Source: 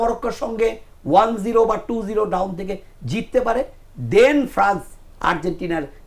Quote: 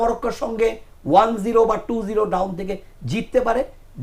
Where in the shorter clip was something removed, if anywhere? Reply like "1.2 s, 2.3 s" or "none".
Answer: none

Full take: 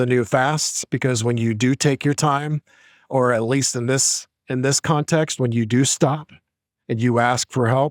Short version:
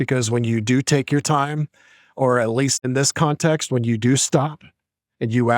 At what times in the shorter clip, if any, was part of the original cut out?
2.8 s

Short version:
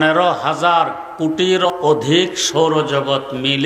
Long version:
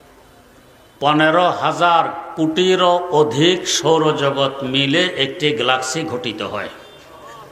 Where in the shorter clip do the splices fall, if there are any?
1.7 s

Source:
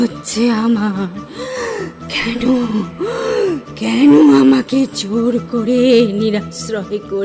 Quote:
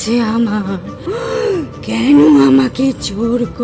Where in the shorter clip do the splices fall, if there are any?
1.0 s

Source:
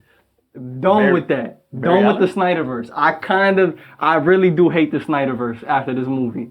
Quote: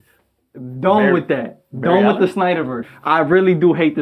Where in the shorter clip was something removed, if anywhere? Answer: 2.9 s

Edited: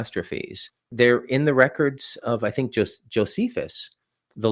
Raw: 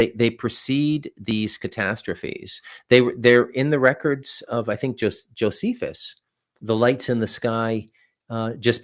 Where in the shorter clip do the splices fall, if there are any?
0.9 s

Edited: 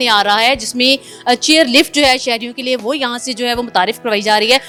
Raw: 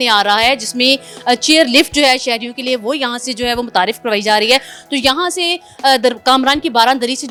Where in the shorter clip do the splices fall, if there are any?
none

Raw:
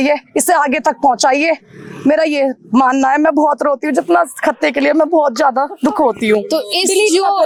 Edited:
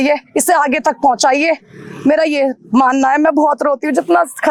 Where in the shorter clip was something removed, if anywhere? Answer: none

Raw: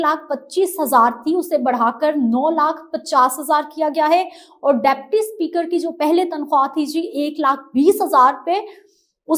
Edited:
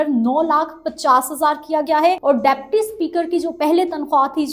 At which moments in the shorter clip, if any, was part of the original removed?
2.2 s

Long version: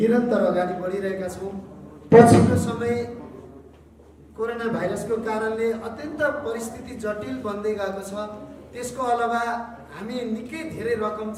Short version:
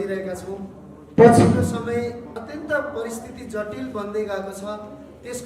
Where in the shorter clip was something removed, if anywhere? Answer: 2.4 s

